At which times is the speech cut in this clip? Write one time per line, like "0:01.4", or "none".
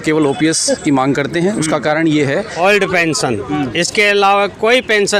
0:02.5